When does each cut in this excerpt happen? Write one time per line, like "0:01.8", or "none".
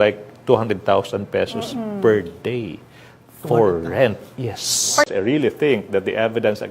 0:05.1

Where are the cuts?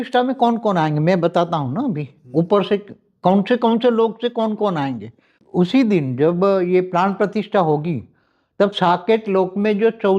0:05.3

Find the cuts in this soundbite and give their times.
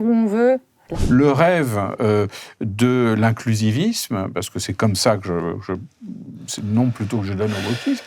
0:01.0

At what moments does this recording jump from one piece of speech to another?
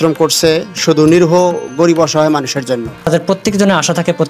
0:03.0

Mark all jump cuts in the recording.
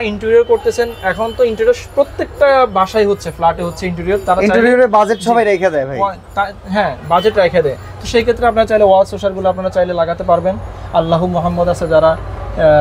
none

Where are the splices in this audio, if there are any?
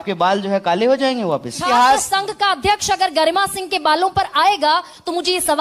0:01.6

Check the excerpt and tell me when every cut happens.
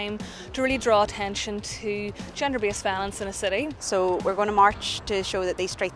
0:03.8

